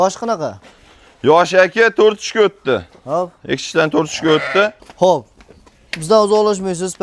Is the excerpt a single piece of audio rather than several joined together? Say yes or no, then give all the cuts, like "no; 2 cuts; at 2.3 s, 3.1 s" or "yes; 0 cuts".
no; 1 cut; at 4.8 s